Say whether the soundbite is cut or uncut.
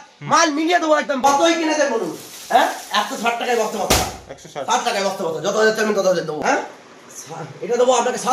cut